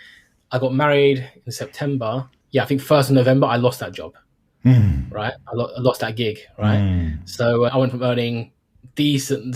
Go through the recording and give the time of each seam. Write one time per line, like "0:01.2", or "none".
0:02.3
0:07.7